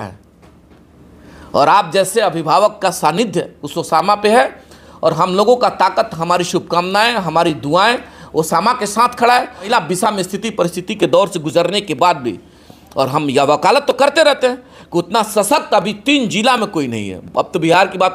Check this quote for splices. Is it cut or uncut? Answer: cut